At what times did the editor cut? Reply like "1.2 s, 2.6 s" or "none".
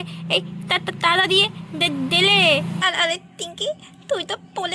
2.8 s